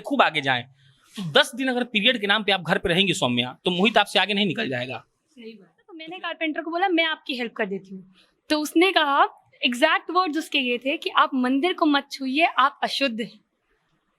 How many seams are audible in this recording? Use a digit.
1